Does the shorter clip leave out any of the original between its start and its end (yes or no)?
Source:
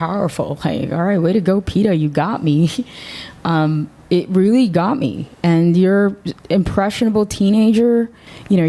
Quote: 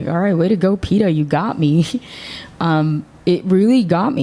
no